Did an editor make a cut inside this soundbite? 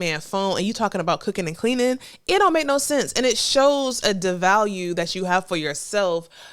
no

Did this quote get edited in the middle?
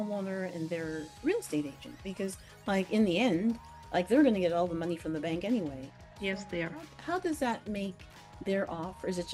no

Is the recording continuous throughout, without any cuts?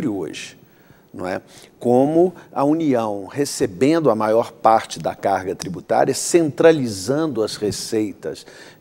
yes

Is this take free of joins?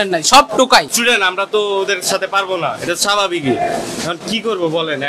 no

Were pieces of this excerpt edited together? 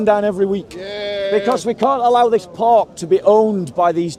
no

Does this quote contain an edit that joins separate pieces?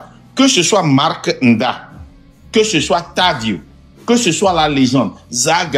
no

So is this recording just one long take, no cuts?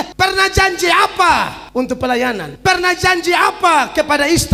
yes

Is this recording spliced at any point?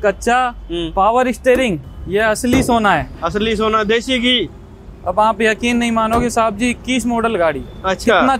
yes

